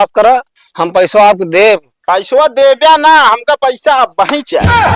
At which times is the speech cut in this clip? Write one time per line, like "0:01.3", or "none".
none